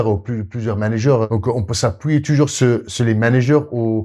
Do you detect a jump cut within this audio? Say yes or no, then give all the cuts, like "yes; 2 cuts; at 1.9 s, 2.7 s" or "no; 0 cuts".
yes; 1 cut; at 1.3 s